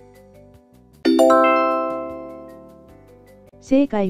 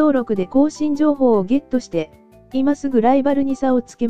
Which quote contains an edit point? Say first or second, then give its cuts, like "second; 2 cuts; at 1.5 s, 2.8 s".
first; 1 cut; at 1.0 s